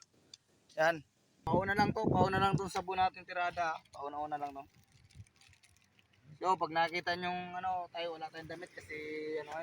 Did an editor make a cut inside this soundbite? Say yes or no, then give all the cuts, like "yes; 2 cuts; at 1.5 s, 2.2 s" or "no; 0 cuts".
yes; 1 cut; at 1.5 s